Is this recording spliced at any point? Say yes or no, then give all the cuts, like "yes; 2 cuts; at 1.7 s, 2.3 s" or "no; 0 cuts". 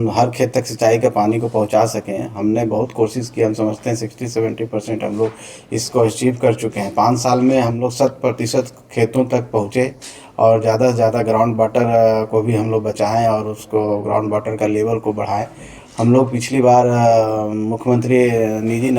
no; 0 cuts